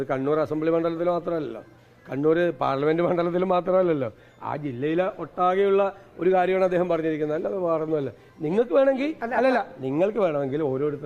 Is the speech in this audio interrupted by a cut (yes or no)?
no